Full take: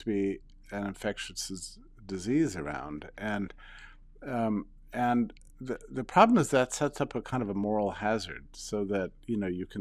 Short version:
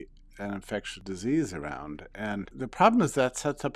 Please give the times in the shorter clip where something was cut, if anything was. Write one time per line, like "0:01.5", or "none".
0:00.9
0:02.6